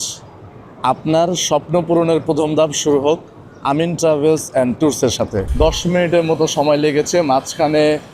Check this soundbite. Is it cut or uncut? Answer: cut